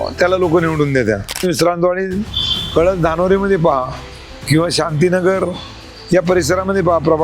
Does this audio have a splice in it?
yes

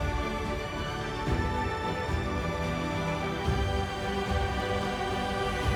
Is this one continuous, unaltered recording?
yes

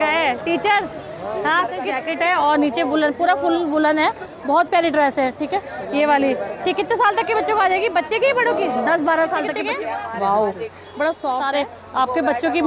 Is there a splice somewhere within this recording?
yes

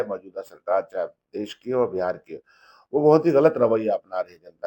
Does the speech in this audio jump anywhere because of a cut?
no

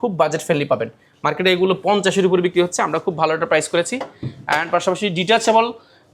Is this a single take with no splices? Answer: yes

